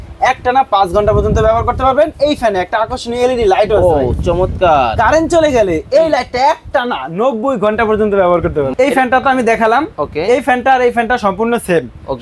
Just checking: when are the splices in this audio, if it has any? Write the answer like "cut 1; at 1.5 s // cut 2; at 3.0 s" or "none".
cut 1; at 8.7 s